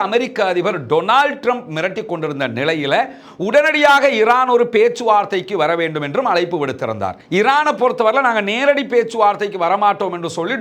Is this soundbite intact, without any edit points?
yes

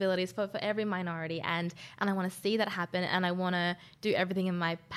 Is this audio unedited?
yes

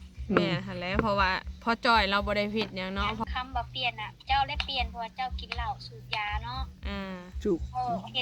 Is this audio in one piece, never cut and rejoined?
no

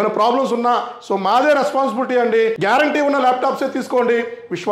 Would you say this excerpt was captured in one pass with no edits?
no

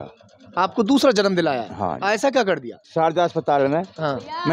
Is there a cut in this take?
yes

